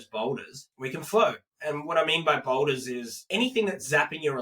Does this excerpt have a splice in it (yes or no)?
yes